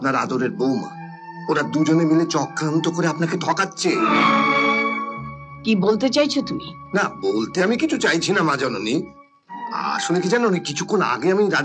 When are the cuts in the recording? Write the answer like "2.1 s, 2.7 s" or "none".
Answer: none